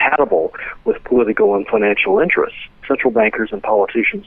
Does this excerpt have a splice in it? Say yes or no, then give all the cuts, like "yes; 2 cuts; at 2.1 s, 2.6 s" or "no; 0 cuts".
yes; 1 cut; at 2.8 s